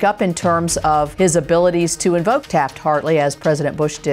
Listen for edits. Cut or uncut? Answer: cut